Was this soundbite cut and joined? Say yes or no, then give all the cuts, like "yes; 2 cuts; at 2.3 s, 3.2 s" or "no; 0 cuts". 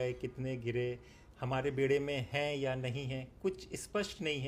no; 0 cuts